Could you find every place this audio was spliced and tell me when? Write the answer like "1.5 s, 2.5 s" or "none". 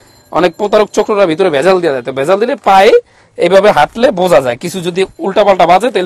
none